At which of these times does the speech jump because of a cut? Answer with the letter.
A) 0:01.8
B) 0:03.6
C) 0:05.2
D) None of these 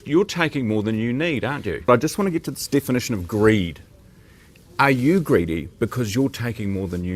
A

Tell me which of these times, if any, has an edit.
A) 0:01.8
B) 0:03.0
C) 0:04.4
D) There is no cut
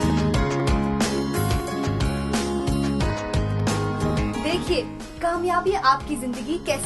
C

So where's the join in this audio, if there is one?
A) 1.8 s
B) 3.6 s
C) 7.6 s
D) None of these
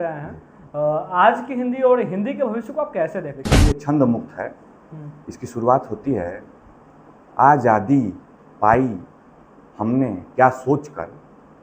B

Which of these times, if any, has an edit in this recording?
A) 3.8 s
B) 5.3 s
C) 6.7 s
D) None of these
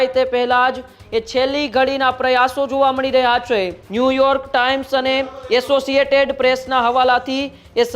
A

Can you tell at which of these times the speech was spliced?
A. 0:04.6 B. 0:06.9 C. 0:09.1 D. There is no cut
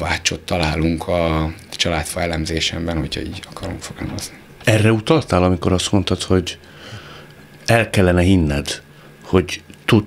A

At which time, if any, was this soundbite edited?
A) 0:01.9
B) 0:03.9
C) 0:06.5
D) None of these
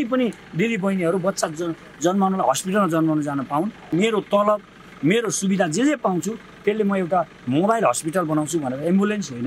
B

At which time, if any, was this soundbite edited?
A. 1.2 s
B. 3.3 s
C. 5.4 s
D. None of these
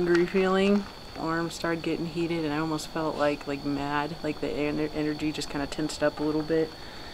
A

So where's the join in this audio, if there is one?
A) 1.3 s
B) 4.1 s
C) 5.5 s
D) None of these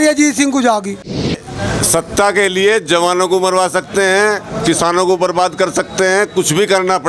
A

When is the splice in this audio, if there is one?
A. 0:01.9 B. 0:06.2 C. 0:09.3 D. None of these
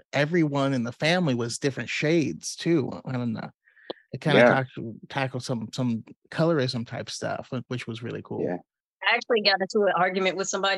C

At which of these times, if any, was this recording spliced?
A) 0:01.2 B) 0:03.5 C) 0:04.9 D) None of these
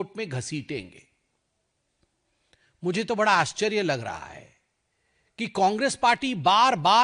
D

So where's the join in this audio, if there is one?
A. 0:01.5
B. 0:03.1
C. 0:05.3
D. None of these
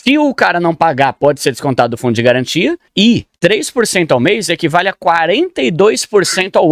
B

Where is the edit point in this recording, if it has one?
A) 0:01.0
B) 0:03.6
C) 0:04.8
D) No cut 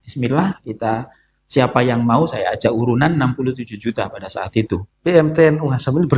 C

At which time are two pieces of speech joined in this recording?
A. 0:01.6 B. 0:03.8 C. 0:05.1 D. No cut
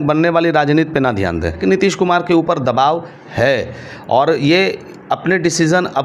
A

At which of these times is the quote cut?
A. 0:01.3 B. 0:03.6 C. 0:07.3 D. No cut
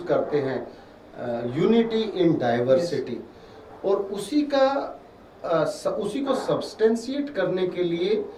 D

